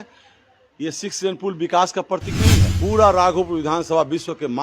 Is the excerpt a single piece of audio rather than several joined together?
no; 1 cut; at 2.7 s

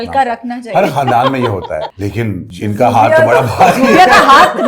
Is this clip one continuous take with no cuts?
no; 1 cut; at 1.9 s

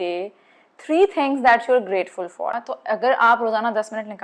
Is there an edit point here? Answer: yes; 1 cut; at 2.7 s

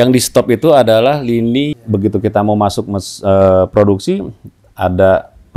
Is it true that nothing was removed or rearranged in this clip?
no; 1 cut; at 1.7 s

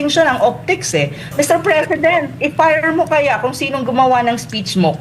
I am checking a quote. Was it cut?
yes; 1 cut; at 1.3 s

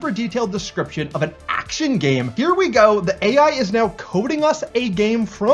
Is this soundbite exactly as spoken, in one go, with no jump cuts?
no; 1 cut; at 2.3 s

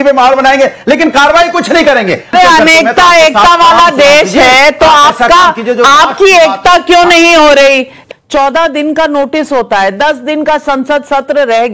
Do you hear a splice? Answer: yes; 2 cuts; at 2.3 s, 7.9 s

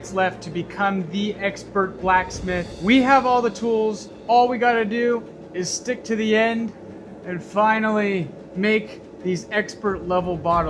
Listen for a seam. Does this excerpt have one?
no; 0 cuts

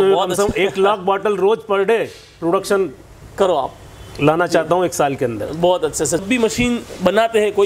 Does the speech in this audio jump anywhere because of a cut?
yes; 1 cut; at 6.2 s

